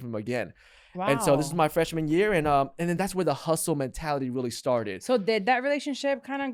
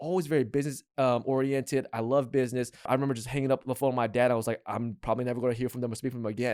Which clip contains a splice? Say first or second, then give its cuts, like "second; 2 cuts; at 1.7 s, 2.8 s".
second; 1 cut; at 2.9 s